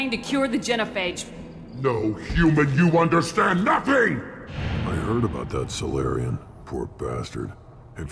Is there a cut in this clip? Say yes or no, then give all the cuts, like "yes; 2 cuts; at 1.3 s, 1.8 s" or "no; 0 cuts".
yes; 1 cut; at 4.3 s